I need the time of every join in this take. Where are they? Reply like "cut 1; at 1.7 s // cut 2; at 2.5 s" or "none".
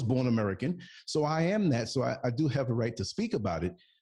none